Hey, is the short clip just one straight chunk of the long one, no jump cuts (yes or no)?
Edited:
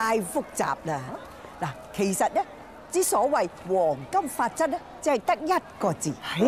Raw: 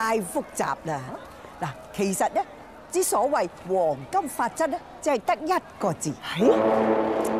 yes